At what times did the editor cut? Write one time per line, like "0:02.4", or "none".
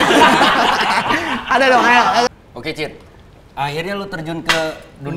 0:02.3